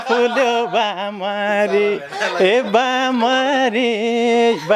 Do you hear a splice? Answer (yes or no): no